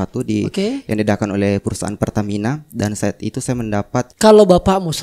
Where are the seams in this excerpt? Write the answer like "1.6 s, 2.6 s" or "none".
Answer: 1.9 s, 4.1 s